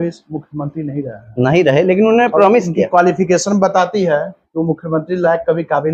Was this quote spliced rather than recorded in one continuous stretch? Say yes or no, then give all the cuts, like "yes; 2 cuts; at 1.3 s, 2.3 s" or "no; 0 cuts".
no; 0 cuts